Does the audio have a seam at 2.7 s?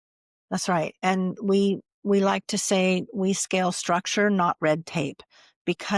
no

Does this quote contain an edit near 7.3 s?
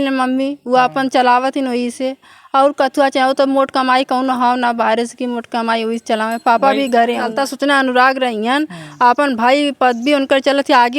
yes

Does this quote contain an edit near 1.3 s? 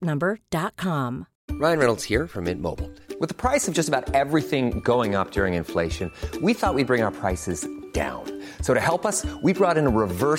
yes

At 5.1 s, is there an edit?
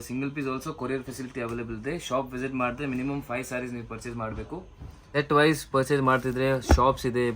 yes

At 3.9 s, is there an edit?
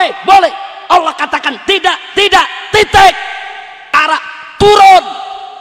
yes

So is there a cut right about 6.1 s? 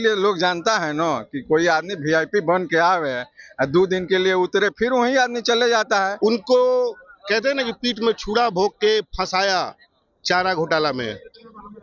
yes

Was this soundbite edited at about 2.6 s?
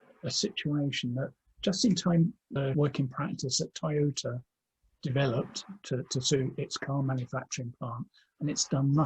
yes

